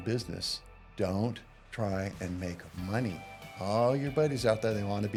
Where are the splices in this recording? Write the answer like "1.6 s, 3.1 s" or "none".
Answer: none